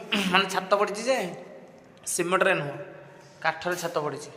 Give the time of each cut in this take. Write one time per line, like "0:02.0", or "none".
none